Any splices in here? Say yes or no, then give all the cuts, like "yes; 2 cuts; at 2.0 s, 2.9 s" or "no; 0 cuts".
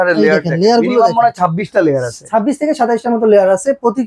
no; 0 cuts